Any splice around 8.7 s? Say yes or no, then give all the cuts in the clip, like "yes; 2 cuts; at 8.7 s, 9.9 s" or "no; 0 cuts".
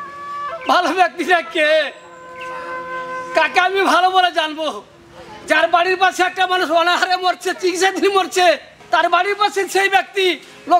yes; 1 cut; at 8.7 s